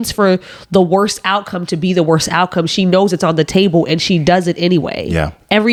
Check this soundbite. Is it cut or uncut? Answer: uncut